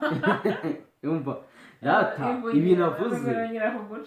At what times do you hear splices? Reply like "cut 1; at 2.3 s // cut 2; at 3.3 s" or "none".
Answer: none